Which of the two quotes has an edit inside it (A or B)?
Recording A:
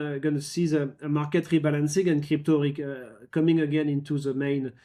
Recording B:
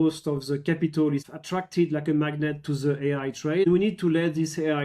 B